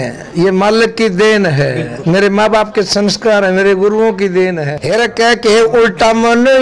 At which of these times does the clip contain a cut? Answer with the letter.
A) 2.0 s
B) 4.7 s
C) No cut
B